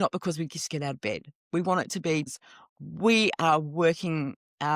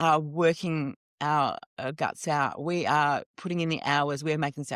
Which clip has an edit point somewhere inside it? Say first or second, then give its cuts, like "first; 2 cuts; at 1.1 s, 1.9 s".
first; 1 cut; at 2.2 s